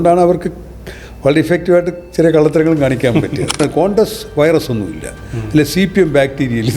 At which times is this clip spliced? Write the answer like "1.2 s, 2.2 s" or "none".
3.6 s